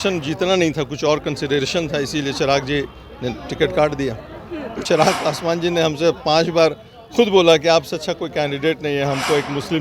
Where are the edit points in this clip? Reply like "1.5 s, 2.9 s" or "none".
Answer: 4.8 s